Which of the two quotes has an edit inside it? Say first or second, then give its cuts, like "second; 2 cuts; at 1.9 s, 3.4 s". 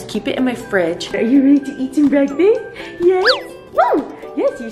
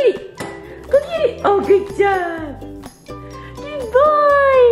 first; 1 cut; at 1.2 s